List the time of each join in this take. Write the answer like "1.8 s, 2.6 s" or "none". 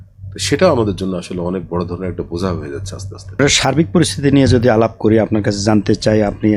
none